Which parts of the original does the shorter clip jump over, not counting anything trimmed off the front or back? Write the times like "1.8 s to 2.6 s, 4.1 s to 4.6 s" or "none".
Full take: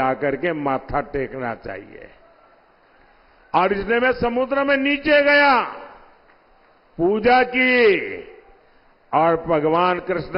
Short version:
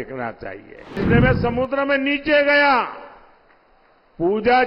2.2 s to 3.8 s